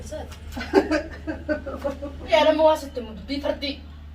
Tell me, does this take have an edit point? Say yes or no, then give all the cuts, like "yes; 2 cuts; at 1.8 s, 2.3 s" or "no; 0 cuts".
yes; 1 cut; at 2.3 s